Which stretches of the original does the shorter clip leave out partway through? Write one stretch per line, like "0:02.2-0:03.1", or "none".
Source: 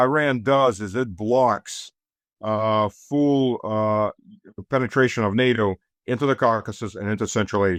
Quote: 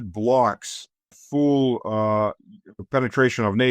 0:02.2-0:03.0